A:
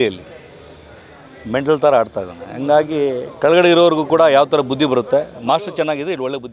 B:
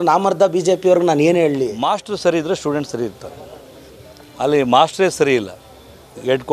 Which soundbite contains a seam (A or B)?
B